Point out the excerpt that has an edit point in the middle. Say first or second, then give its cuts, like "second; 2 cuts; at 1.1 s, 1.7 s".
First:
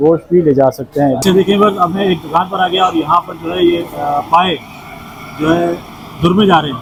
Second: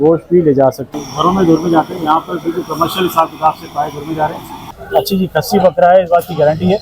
second; 2 cuts; at 0.9 s, 4.7 s